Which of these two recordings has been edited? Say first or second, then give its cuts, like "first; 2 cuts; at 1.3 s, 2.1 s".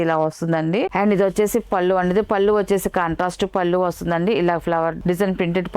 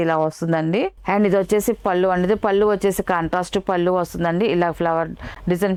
first; 2 cuts; at 0.9 s, 5.0 s